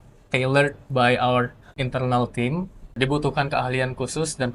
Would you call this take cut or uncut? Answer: cut